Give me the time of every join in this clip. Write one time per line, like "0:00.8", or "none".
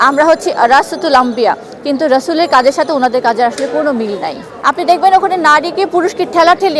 0:04.5

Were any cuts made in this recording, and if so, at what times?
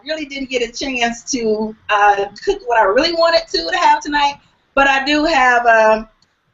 0:04.1

